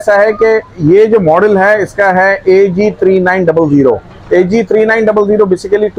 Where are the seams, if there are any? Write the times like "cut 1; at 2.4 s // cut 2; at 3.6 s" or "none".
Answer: none